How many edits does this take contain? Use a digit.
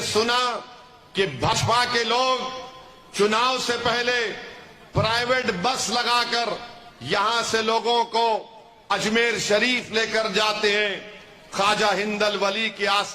1